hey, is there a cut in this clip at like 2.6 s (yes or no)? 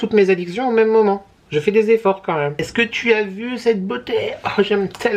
yes